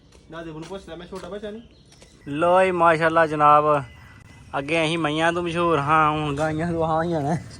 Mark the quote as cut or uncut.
cut